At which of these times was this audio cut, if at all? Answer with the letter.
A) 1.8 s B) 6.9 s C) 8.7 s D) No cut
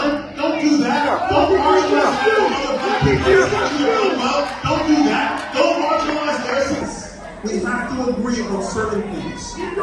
B